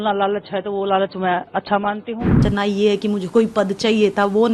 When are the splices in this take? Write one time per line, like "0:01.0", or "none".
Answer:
0:02.4